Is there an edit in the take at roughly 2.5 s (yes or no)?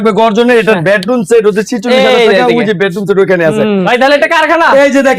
no